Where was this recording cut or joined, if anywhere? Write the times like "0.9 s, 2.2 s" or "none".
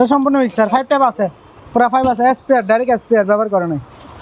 none